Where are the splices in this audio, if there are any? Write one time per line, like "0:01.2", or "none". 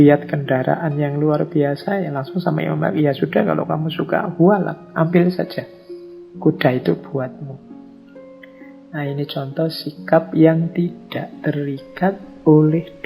0:07.6
0:08.9